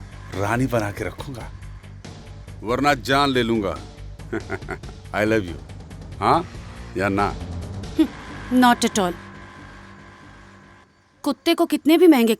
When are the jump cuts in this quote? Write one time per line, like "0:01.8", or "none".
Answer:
0:10.8